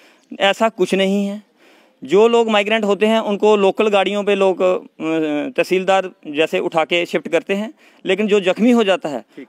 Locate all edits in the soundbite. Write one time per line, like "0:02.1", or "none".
none